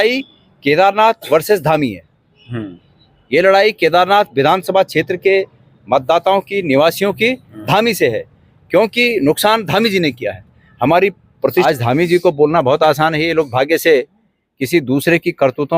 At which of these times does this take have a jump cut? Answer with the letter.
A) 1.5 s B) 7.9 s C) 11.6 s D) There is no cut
C